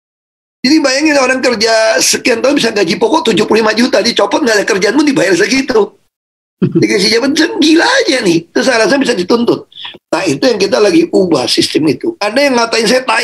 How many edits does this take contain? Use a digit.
1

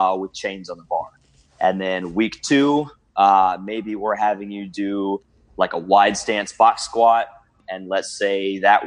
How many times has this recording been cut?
1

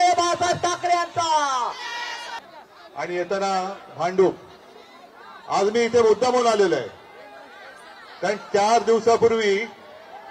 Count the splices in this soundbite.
1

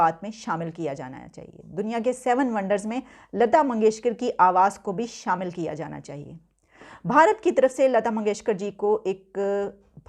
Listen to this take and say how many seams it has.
0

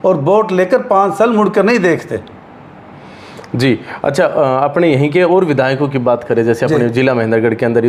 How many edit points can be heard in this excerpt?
0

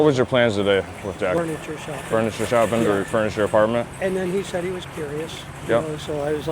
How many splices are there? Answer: 1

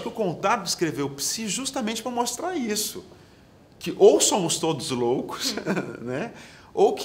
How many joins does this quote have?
0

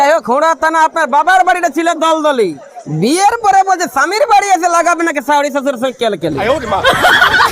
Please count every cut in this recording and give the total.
1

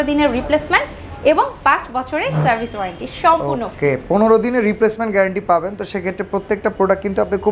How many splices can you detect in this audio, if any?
0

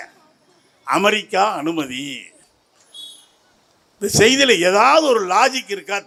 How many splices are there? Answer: 0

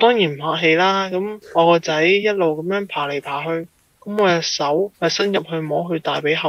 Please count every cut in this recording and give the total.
2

